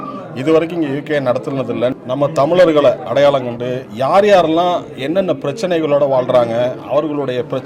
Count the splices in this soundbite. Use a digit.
1